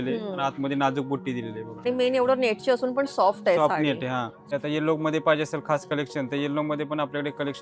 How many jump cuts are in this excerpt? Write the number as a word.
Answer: two